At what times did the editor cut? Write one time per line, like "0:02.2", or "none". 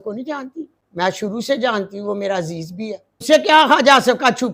0:01.3
0:03.2